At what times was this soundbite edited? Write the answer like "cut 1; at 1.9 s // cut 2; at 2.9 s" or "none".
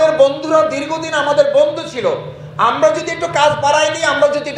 none